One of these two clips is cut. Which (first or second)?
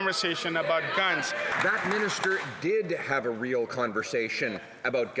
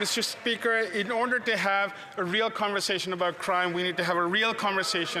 first